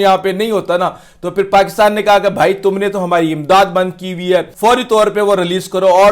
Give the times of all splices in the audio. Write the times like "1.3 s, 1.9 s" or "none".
4.5 s